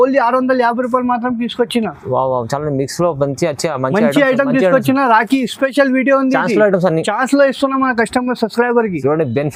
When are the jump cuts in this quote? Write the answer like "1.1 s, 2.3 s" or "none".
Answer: none